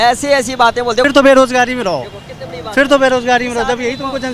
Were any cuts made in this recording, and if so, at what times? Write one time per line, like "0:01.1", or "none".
0:01.1